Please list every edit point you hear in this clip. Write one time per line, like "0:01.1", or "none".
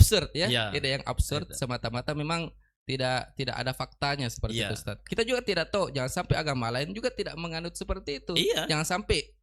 0:05.0